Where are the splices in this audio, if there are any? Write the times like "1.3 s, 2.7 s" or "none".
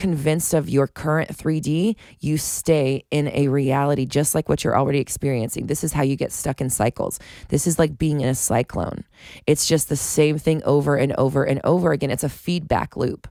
none